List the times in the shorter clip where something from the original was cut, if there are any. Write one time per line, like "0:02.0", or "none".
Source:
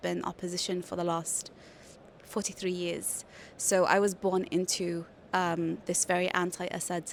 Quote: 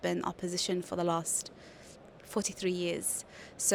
none